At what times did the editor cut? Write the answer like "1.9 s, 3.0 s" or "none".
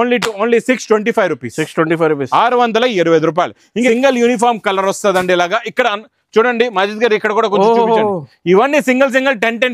3.9 s